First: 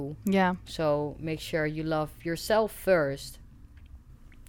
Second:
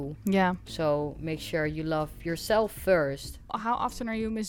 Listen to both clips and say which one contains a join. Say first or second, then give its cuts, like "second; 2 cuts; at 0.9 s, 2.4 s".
second; 1 cut; at 3.5 s